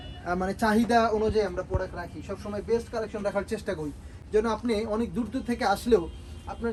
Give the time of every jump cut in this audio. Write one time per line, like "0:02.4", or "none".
none

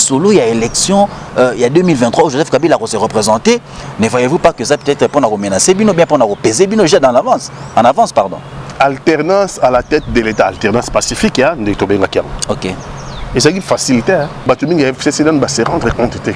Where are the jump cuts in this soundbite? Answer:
0:14.4

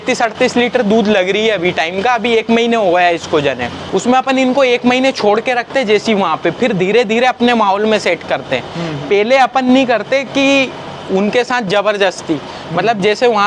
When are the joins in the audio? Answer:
0:03.7

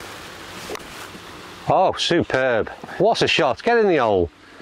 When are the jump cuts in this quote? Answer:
none

